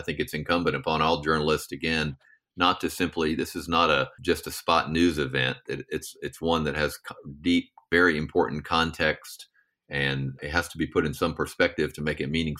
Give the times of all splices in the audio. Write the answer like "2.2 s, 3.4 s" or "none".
4.1 s, 7.8 s, 10.4 s